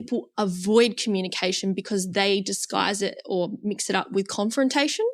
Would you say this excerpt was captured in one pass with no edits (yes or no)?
yes